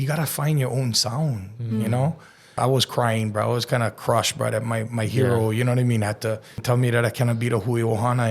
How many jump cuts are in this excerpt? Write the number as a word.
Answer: two